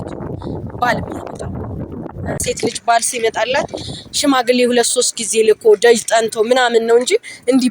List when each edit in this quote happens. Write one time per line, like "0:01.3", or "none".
0:02.3

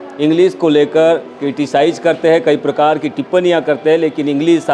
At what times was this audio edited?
none

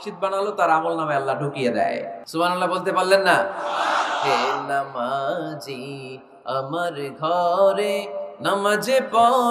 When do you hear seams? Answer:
0:02.2

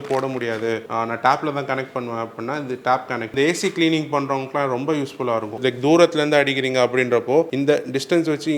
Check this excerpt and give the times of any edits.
0:00.9
0:03.3
0:05.5
0:07.5

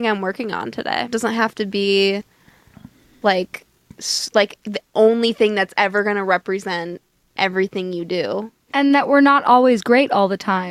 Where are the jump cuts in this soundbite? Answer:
0:01.1
0:08.6

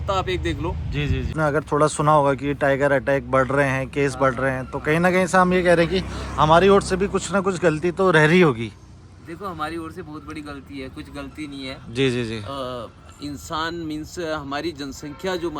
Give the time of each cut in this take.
0:01.3

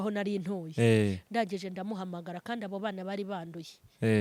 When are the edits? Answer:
none

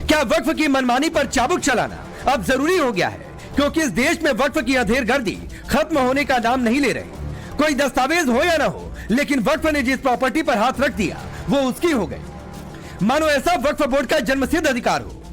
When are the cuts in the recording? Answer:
0:01.1

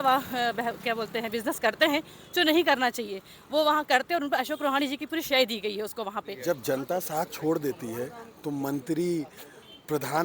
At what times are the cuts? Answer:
0:06.3

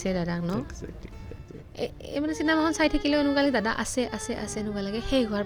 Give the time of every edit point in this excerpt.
none

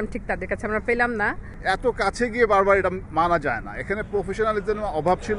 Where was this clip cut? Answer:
0:01.5

